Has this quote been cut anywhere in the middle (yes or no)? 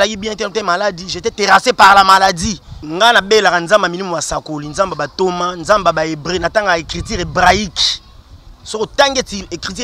yes